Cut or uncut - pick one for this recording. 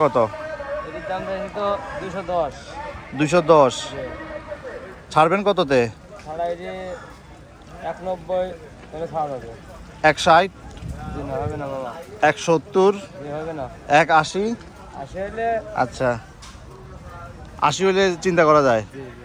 uncut